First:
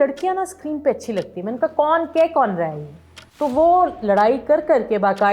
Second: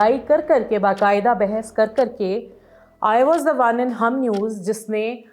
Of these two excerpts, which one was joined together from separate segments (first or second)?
first